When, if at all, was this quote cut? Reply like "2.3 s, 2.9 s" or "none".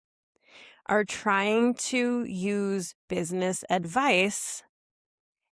none